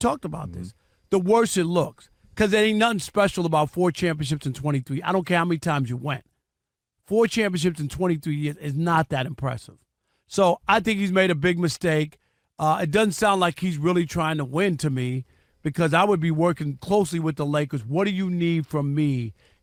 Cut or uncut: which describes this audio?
uncut